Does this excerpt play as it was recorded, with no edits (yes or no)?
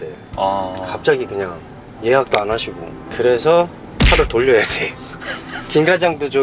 yes